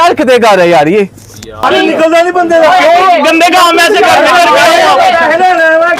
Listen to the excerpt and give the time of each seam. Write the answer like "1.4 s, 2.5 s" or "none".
1.7 s